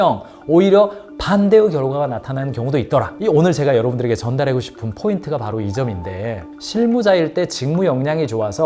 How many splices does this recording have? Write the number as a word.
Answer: one